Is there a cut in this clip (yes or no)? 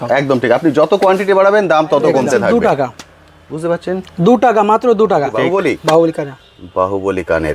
yes